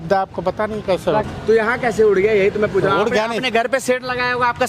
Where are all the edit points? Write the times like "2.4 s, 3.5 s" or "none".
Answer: 1.2 s